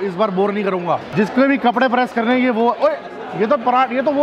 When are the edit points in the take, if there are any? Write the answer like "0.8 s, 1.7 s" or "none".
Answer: 1.1 s